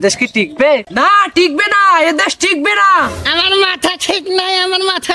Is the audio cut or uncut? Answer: cut